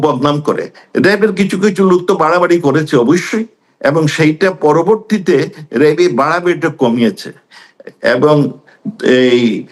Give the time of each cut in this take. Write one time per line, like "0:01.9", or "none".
none